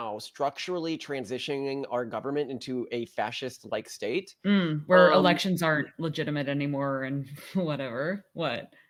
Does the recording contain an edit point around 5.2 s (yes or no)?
no